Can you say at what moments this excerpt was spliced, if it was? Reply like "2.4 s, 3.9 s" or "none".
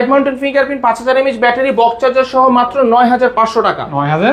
none

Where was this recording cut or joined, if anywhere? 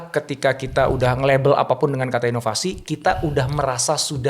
none

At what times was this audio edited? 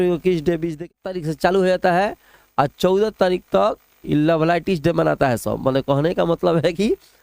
0.9 s

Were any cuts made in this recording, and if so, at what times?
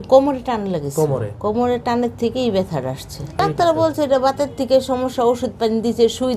3.4 s

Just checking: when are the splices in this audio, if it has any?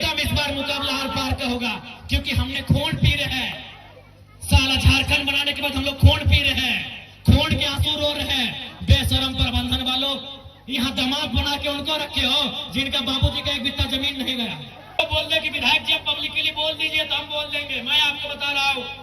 15.0 s

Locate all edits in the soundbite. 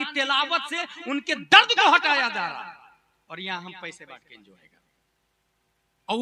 none

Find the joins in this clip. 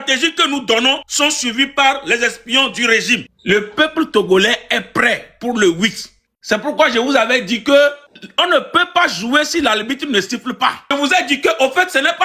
1.1 s, 3.3 s, 10.9 s

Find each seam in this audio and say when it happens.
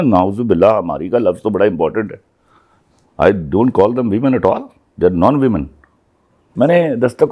6.4 s

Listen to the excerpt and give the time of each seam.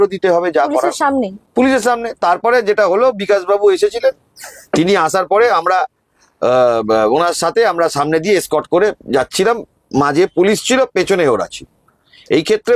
none

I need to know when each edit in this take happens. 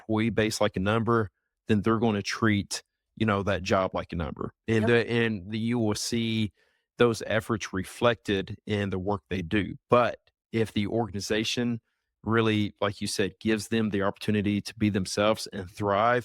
none

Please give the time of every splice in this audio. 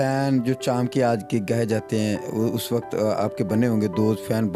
none

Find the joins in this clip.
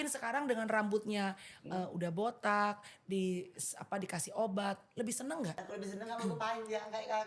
5.6 s

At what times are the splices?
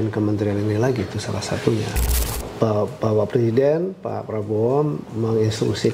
2.3 s

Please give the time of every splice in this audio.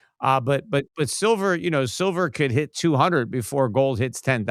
none

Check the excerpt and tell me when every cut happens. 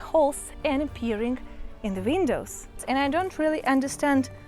2.7 s

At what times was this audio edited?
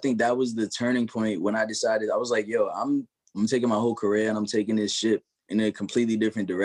3.4 s, 5.3 s

